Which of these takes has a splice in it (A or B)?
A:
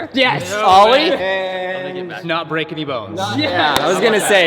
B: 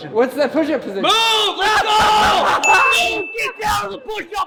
A